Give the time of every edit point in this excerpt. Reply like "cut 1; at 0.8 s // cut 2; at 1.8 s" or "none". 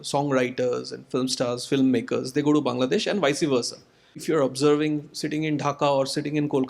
cut 1; at 1.0 s // cut 2; at 4.2 s